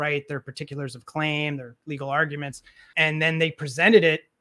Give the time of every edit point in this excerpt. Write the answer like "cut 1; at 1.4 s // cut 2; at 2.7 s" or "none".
cut 1; at 2.8 s